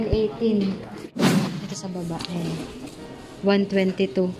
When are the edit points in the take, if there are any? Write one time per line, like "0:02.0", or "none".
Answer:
0:01.2